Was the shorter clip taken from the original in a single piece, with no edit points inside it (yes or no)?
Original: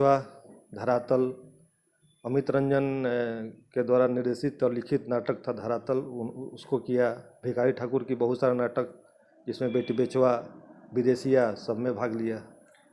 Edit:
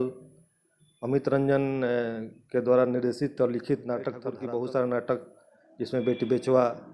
no